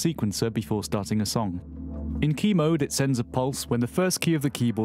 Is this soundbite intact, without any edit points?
yes; 0 cuts

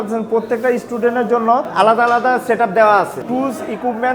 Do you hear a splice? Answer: yes; 2 cuts; at 1.7 s, 3.2 s

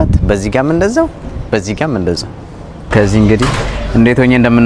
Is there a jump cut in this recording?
yes; 1 cut; at 2.9 s

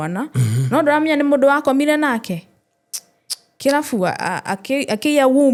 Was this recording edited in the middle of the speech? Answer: no; 0 cuts

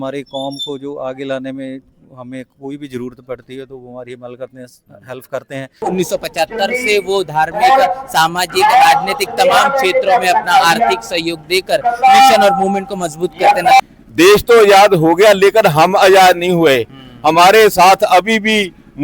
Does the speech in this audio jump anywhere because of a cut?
yes; 2 cuts; at 5.8 s, 13.8 s

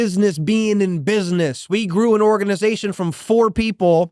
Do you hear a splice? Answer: yes; 1 cut; at 1.6 s

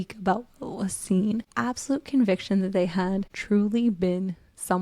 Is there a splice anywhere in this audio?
yes; 2 cuts; at 1.5 s, 3.3 s

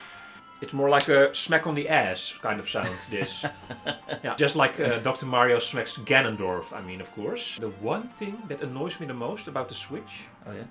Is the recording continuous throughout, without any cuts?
no; 2 cuts; at 4.3 s, 7.6 s

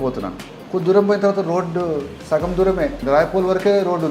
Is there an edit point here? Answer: yes; 2 cuts; at 2.2 s, 3.0 s

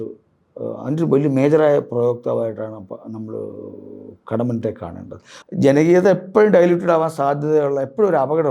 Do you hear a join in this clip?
yes; 1 cut; at 5.3 s

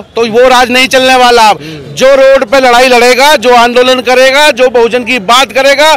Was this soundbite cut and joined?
no; 0 cuts

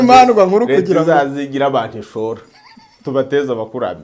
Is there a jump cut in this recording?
no; 0 cuts

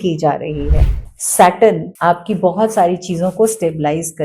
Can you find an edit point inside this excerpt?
yes; 2 cuts; at 1.0 s, 1.9 s

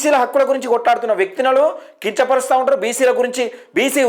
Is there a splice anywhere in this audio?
no; 0 cuts

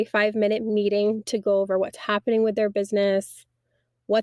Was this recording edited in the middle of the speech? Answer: no; 0 cuts

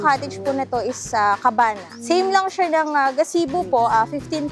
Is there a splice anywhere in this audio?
yes; 1 cut; at 2.0 s

